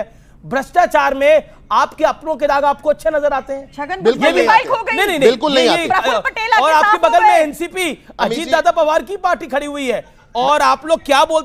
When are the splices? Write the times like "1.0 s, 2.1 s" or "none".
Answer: none